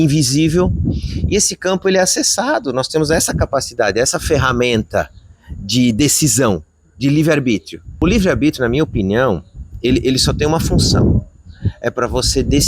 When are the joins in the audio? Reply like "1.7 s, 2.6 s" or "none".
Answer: 7.9 s